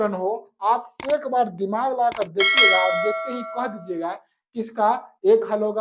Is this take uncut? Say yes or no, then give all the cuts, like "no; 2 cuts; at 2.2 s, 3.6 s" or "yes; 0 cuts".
yes; 0 cuts